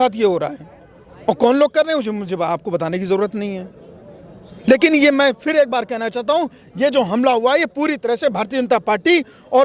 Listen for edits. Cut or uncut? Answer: uncut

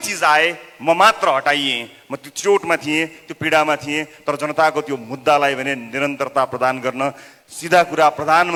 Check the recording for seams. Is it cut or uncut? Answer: uncut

